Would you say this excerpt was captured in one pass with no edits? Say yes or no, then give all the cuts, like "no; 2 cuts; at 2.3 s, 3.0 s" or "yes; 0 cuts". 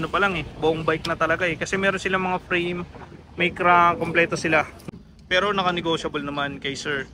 no; 1 cut; at 4.8 s